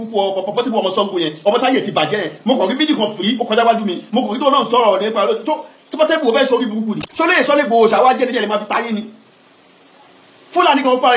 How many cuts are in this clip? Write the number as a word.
one